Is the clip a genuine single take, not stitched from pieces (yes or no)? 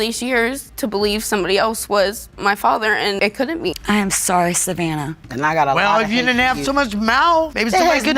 no